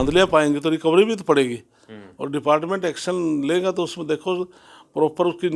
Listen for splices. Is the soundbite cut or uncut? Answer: uncut